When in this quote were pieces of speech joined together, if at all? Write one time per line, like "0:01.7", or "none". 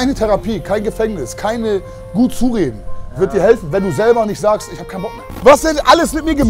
0:05.2